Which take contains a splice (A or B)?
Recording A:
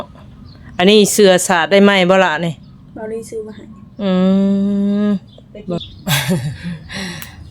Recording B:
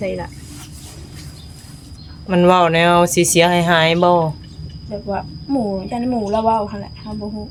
A